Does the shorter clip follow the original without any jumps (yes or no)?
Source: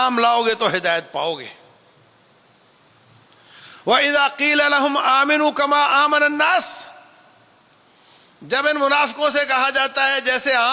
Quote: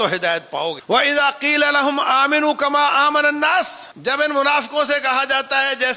no